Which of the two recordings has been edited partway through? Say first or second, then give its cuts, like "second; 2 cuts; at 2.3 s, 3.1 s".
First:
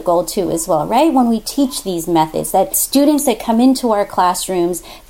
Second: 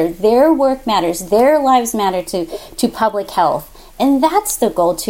first; 1 cut; at 2.8 s